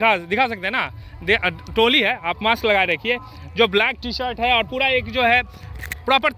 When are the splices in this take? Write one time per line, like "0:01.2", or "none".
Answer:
none

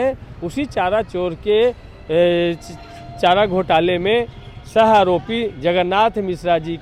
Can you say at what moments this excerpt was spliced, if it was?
none

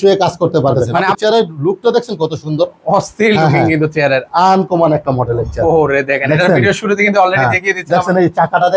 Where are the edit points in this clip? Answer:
0:01.0
0:04.2

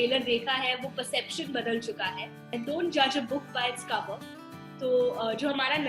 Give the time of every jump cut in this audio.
0:02.5

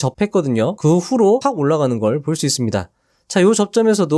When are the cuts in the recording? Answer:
0:00.8
0:01.4

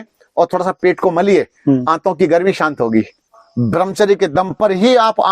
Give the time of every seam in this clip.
0:03.4

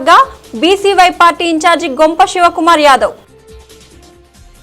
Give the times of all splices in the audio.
0:03.7

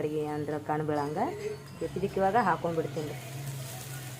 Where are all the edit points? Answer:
0:01.7

